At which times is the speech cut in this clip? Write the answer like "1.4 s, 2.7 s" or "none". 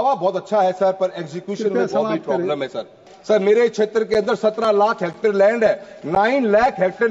3.1 s